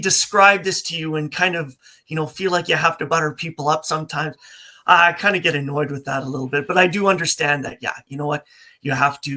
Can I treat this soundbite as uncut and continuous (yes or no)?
yes